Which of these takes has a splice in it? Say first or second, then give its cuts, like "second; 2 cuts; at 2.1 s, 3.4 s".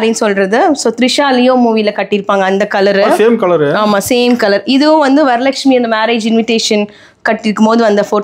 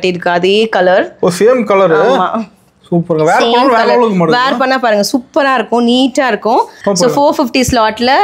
second; 1 cut; at 6.8 s